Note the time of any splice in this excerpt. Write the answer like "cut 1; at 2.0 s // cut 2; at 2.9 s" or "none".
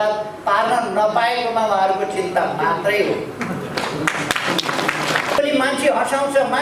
cut 1; at 5.4 s